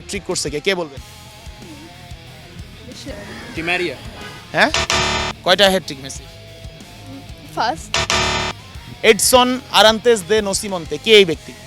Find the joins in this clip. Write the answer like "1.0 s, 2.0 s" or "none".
5.3 s, 8.6 s